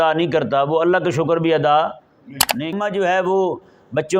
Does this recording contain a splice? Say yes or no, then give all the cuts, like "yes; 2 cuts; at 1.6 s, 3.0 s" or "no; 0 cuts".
yes; 1 cut; at 2.7 s